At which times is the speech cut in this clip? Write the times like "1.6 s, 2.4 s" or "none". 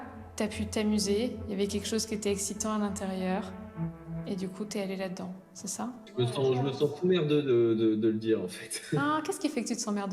4.2 s, 8.0 s